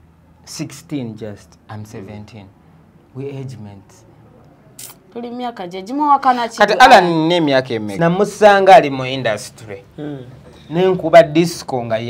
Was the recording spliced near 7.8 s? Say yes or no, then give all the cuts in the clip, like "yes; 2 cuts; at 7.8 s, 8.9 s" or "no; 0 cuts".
yes; 1 cut; at 7.8 s